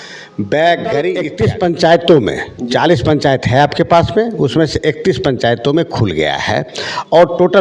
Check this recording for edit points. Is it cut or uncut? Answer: cut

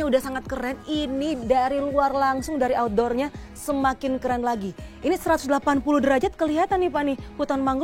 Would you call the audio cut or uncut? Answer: uncut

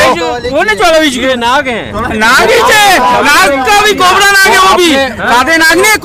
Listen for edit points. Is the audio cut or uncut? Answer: uncut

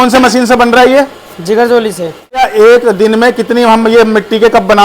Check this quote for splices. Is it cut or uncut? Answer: cut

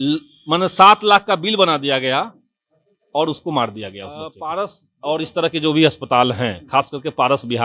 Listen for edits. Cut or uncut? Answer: cut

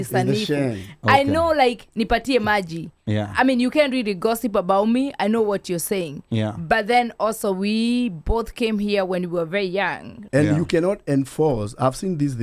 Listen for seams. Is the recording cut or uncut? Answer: cut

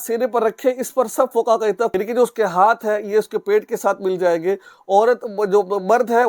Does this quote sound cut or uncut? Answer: cut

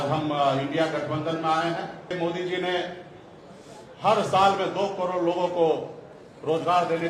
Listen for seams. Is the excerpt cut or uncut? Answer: cut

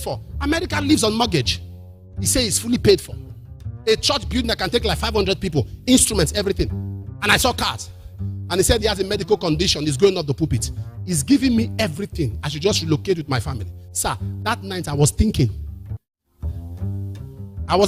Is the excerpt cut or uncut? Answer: uncut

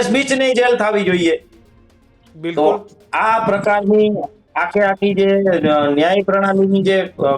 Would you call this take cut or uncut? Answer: uncut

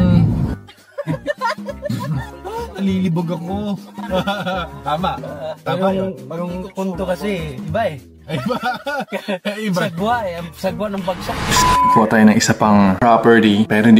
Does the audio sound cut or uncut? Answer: cut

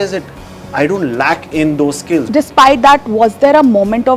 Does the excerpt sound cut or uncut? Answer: cut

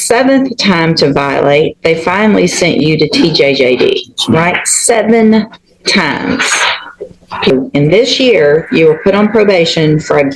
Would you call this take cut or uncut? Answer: cut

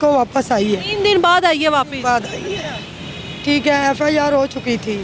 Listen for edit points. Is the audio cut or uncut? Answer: uncut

